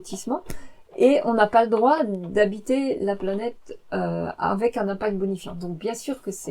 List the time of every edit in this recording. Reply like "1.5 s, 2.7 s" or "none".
none